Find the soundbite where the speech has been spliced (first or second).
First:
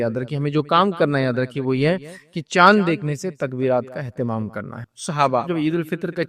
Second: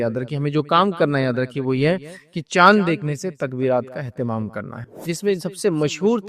second